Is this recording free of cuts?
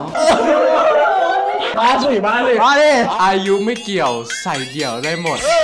yes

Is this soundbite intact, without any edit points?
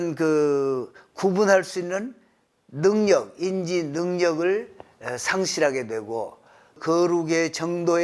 no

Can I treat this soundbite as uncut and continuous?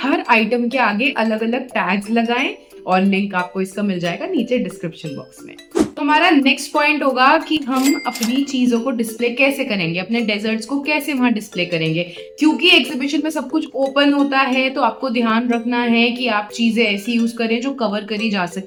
yes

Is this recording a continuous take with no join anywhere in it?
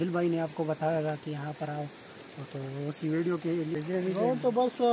no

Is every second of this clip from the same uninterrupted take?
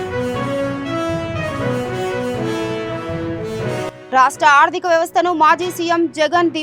yes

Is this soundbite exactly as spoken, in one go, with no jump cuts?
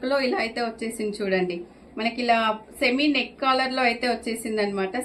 yes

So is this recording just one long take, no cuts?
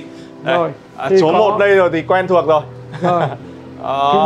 yes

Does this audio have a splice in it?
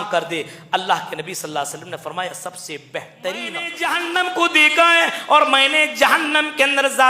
yes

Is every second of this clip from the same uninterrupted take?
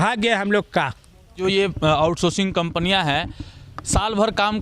no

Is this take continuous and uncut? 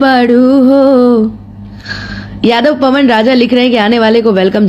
yes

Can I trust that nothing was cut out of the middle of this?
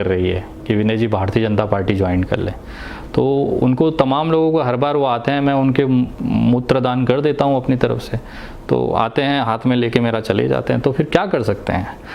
yes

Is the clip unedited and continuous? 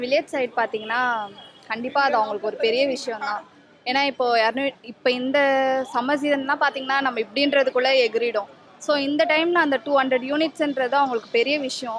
yes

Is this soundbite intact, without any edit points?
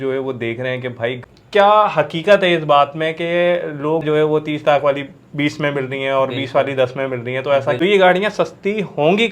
no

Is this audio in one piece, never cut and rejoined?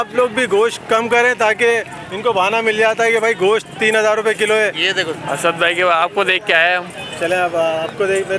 no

